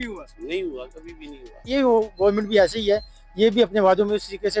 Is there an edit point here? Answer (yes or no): yes